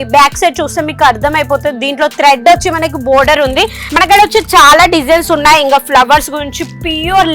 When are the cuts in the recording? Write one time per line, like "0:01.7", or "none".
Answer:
0:03.9